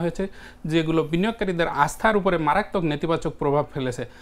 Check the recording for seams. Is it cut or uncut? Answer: cut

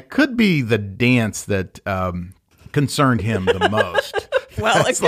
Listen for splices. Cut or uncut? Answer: uncut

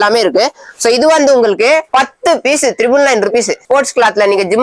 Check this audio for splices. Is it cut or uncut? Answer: cut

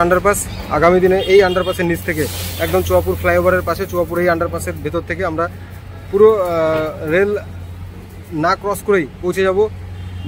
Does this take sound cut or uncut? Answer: uncut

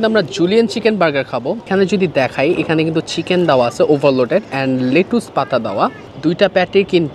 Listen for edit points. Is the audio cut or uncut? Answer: cut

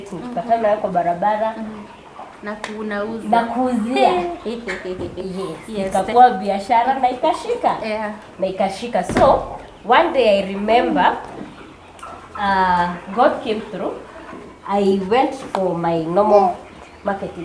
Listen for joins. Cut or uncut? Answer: uncut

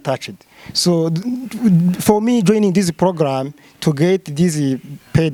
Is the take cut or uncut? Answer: uncut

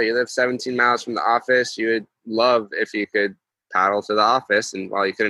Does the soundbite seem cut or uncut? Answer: uncut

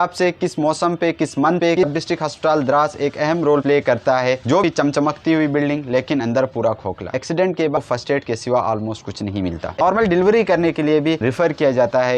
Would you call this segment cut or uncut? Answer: cut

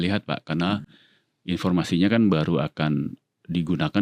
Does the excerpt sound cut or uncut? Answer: uncut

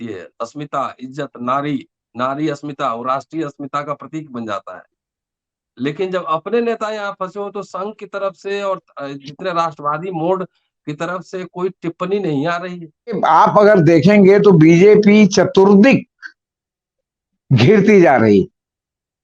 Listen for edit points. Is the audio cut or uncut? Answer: cut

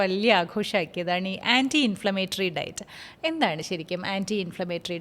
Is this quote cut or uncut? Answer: uncut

